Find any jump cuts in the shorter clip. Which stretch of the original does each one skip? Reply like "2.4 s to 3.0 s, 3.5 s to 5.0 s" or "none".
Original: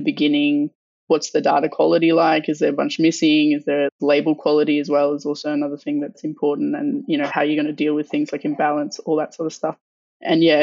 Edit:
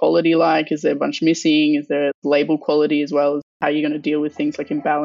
5.3 s to 7.3 s